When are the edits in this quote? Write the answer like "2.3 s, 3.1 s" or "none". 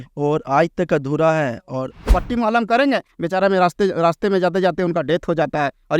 2.1 s